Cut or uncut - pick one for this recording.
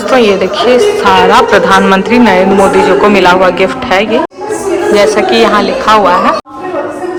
uncut